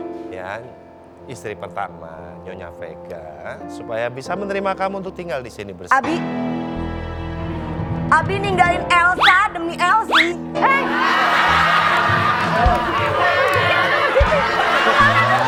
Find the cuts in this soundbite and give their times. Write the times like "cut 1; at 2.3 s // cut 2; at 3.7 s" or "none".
none